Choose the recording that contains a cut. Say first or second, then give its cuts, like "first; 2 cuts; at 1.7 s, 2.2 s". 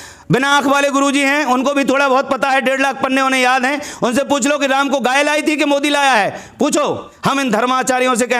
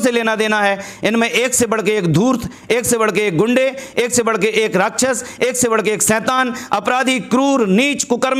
first; 1 cut; at 7.1 s